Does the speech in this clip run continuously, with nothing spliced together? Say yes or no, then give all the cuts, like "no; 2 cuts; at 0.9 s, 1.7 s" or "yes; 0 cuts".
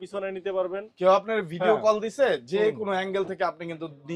yes; 0 cuts